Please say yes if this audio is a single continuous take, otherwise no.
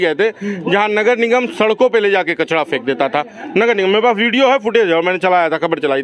yes